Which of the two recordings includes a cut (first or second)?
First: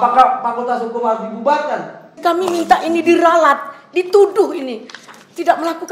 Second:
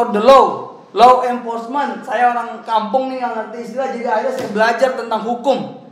first